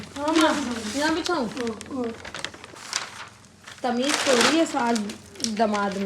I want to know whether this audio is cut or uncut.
cut